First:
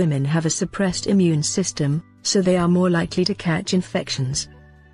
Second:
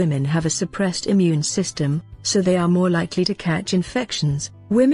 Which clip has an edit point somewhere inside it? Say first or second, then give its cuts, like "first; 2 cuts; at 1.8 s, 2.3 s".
second; 1 cut; at 4.0 s